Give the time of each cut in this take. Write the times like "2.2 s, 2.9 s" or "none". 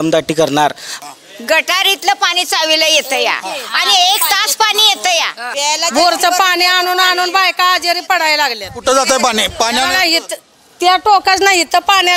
0.9 s, 5.4 s